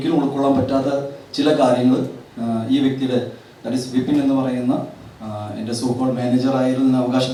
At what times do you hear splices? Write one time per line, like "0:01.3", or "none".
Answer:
none